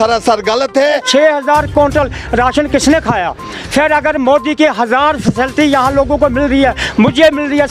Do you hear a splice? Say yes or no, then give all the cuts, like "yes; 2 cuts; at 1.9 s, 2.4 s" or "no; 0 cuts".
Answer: yes; 1 cut; at 1.0 s